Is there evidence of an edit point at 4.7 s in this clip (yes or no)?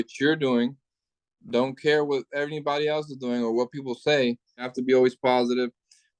yes